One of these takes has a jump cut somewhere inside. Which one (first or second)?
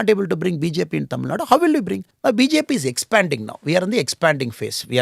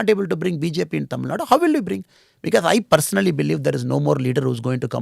first